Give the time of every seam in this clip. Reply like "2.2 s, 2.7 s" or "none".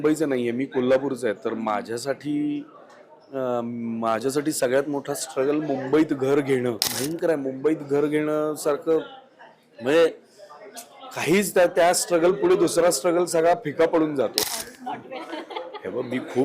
6.9 s, 14.4 s